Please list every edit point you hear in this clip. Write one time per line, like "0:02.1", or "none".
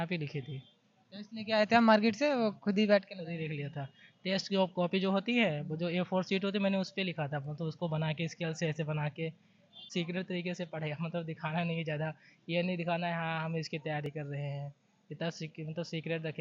0:09.8